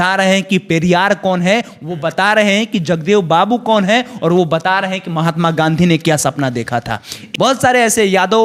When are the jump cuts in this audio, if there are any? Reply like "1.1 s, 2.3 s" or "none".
7.2 s